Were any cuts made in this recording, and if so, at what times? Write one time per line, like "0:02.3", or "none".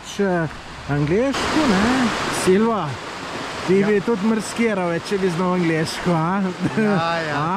0:02.2